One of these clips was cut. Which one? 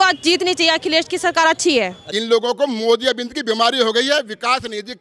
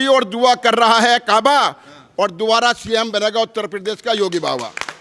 first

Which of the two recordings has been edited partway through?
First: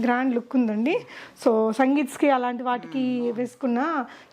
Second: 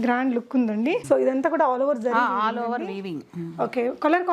second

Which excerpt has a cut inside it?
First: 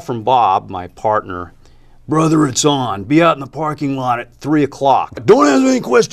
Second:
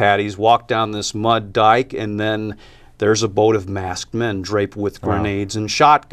first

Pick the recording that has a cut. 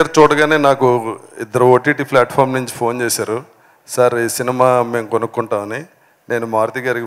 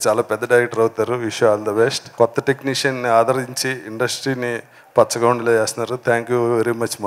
second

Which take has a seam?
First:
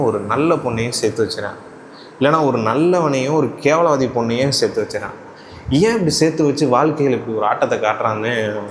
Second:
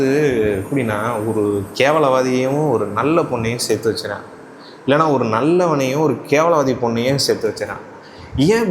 second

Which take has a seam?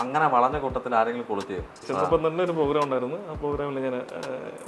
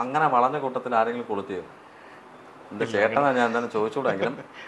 first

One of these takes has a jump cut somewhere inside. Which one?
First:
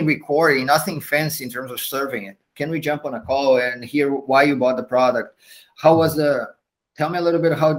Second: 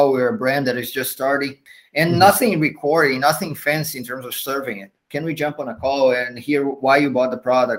second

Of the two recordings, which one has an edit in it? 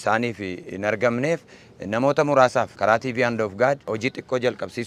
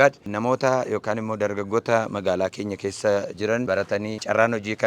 second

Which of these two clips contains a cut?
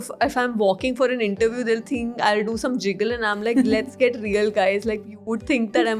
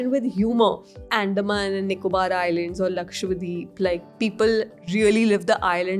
second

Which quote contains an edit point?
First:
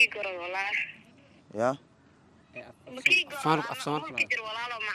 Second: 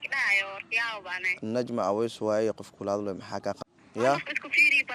second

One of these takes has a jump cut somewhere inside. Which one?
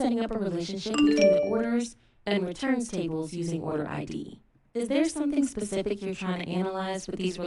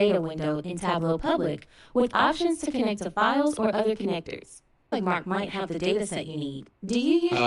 second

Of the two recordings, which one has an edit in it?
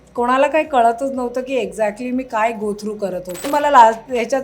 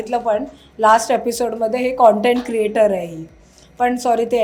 first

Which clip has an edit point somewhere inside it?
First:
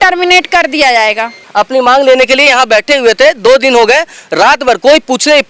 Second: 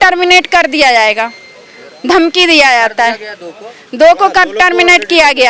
first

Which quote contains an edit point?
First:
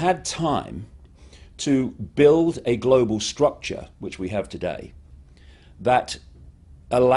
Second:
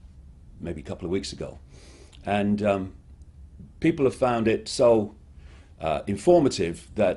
first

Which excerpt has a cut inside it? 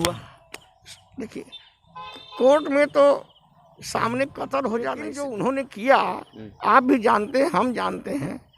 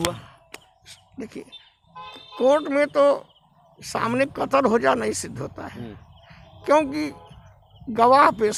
first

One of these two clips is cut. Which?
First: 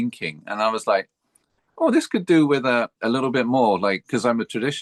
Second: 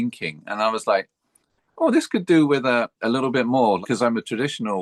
second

